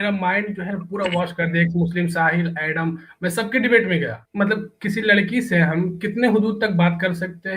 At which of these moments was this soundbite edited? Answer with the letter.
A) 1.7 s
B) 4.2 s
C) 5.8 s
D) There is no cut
B